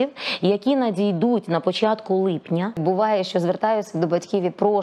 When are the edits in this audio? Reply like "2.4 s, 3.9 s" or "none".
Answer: 2.8 s